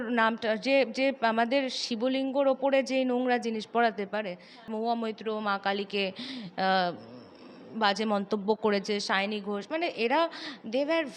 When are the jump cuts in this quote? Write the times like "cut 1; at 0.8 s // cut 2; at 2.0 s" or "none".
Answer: cut 1; at 4.7 s